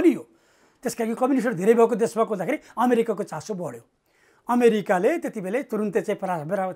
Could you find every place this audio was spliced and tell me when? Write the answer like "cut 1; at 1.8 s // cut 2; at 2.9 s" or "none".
none

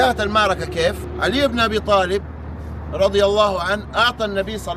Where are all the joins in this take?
cut 1; at 1.1 s

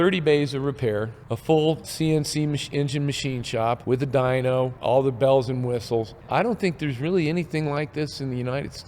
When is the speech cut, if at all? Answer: cut 1; at 1.2 s // cut 2; at 1.9 s // cut 3; at 3.8 s // cut 4; at 4.8 s // cut 5; at 6.2 s

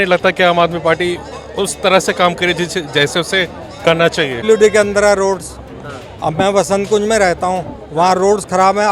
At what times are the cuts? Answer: cut 1; at 4.4 s

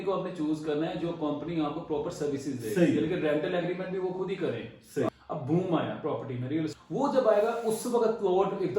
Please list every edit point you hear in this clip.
cut 1; at 5.1 s // cut 2; at 6.7 s

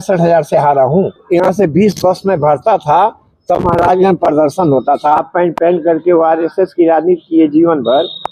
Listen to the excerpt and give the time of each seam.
cut 1; at 1.2 s // cut 2; at 5.2 s

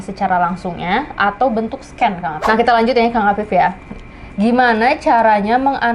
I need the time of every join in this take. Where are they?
cut 1; at 2.4 s

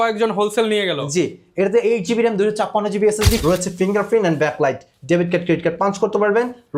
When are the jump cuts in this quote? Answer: cut 1; at 3.4 s

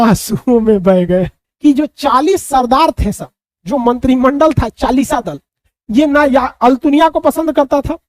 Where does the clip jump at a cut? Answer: cut 1; at 1.4 s

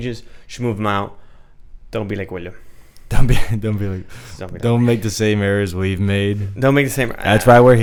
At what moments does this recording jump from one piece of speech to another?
none

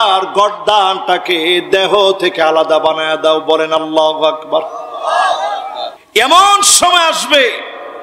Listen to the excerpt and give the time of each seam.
cut 1; at 6.0 s

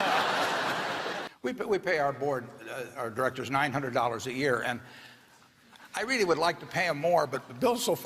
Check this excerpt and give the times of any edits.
cut 1; at 1.2 s

